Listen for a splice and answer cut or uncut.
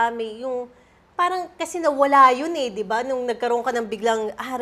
uncut